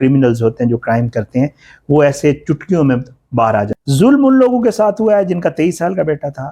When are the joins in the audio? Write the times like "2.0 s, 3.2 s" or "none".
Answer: 3.7 s